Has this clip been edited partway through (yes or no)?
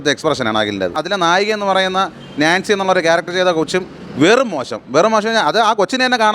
yes